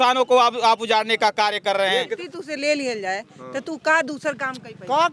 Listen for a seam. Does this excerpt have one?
yes; 1 cut; at 2.2 s

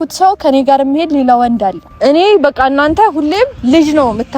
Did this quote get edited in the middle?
yes; 1 cut; at 1.9 s

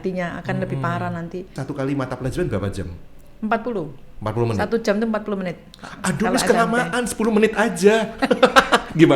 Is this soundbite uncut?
no; 1 cut; at 1.6 s

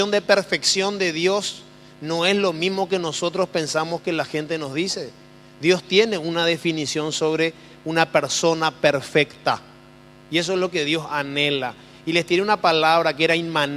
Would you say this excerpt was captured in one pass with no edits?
yes; 0 cuts

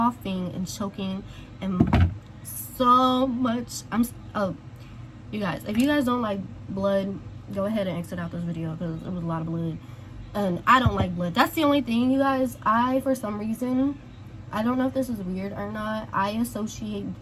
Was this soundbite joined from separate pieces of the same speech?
no; 0 cuts

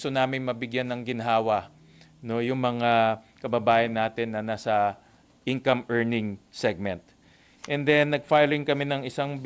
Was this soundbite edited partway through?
no; 0 cuts

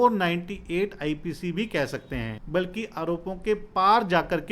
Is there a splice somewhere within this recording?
yes; 1 cut; at 2.4 s

